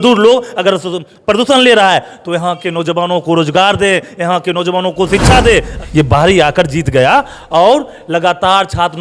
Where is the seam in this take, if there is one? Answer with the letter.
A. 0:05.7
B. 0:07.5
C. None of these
A